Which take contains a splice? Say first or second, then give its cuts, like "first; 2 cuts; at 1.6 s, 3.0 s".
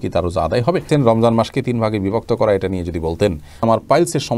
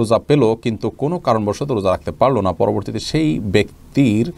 first; 2 cuts; at 0.8 s, 3.5 s